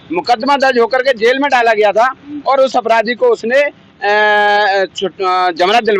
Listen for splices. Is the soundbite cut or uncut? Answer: uncut